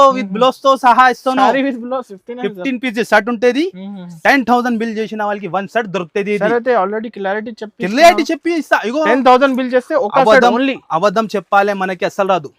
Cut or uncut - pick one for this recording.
uncut